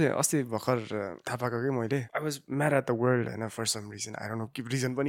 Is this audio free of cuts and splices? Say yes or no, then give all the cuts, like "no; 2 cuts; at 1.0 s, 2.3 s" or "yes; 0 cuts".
no; 2 cuts; at 1.2 s, 2.1 s